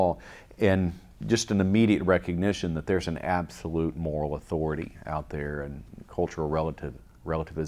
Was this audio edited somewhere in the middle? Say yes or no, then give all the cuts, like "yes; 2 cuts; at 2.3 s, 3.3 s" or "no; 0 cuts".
no; 0 cuts